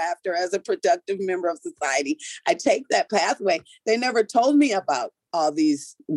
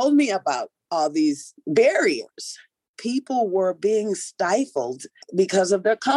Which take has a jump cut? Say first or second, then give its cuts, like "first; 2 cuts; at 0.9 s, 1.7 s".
second; 2 cuts; at 3.0 s, 5.3 s